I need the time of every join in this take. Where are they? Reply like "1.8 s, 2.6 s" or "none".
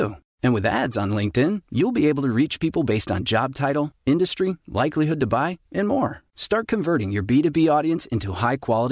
none